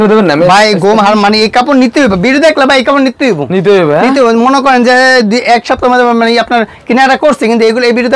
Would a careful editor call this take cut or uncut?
uncut